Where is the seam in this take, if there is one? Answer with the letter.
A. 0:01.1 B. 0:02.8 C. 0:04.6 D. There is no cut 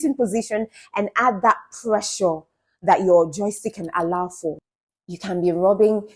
C